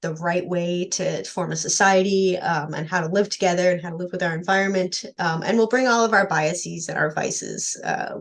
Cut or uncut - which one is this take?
uncut